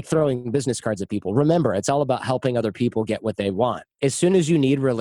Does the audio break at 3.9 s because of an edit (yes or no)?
yes